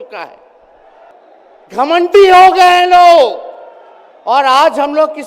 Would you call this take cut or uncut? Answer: cut